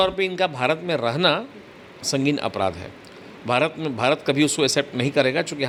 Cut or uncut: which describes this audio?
uncut